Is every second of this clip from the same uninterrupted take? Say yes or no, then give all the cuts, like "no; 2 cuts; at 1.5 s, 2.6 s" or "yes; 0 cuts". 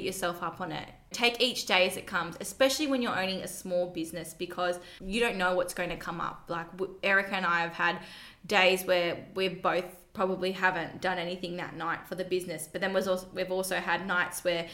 yes; 0 cuts